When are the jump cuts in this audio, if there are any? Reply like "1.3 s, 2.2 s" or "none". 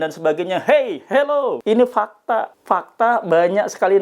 1.6 s, 2.5 s

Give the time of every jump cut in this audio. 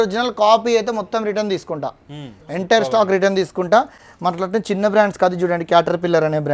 none

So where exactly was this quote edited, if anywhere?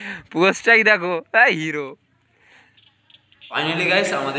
3.3 s

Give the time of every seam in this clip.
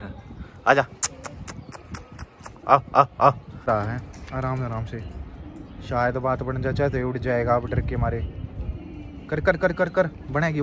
3.7 s

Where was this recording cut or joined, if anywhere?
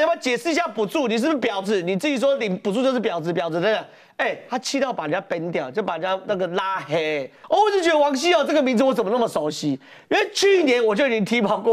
7.3 s

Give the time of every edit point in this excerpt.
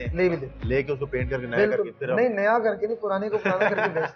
none

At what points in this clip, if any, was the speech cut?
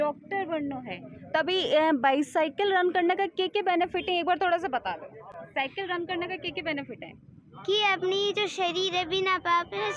none

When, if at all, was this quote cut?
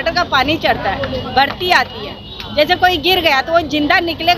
none

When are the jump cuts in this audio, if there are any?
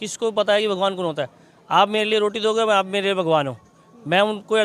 none

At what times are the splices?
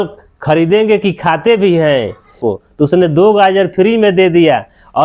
2.4 s

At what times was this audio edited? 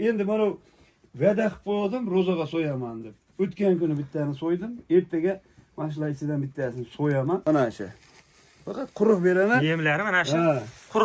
7.4 s

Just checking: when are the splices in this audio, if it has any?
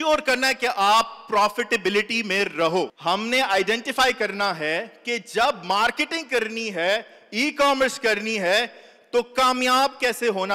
none

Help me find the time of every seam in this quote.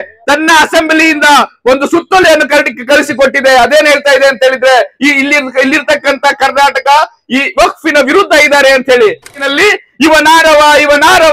9.4 s

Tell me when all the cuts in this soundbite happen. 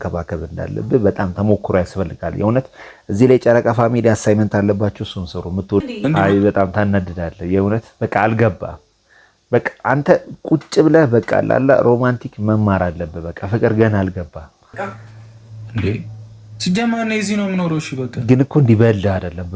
5.8 s, 14.7 s

